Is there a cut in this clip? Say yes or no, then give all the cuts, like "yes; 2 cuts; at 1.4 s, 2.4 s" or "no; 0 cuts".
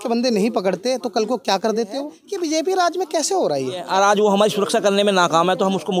yes; 2 cuts; at 2.2 s, 3.8 s